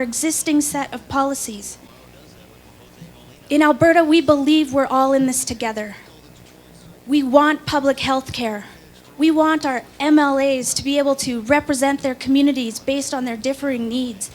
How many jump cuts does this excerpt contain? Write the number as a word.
zero